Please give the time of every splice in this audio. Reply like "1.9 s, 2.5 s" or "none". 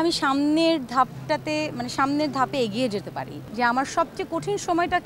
3.4 s